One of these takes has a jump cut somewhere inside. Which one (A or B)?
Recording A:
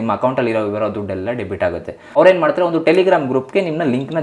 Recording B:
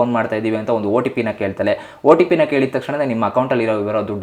A